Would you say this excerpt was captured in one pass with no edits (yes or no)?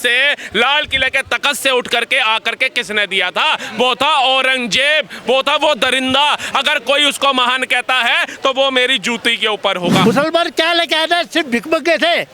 no